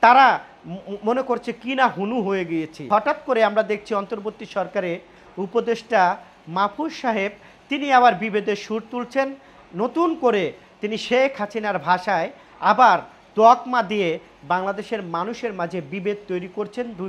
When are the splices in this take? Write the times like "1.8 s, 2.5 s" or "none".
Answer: 2.9 s

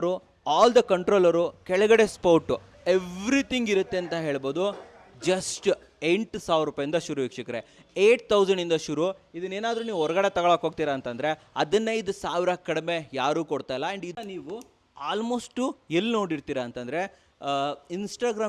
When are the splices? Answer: 14.2 s

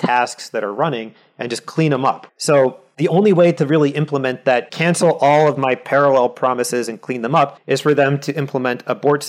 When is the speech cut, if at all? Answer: 2.2 s, 2.9 s, 4.7 s, 7.6 s

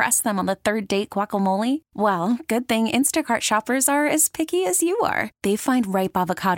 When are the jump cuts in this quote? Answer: none

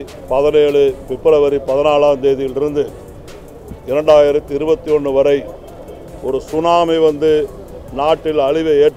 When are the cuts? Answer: none

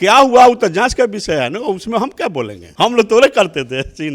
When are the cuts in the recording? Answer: 2.6 s

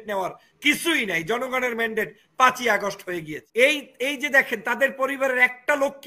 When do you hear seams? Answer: 3.4 s

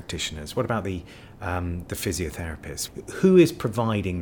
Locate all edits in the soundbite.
2.8 s

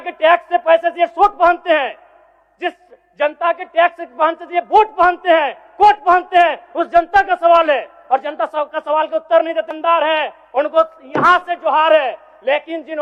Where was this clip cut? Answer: none

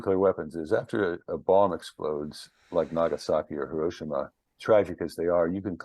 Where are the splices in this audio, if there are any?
4.4 s

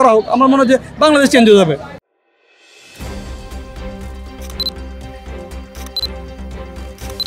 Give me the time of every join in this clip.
none

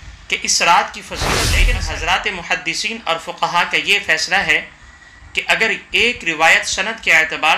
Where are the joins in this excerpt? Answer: 1.5 s

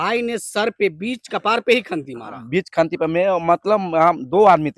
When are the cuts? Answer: none

